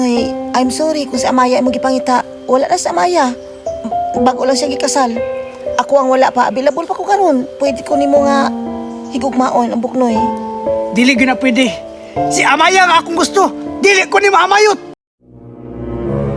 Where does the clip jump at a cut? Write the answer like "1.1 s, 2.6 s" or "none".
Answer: 15.3 s